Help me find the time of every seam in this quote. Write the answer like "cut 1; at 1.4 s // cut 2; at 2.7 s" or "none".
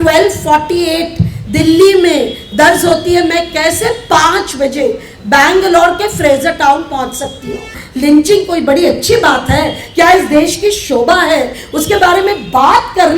cut 1; at 7.7 s